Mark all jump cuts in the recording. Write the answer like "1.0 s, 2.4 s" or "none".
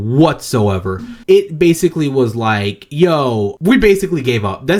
none